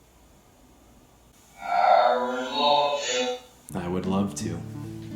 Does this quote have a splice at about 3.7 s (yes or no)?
no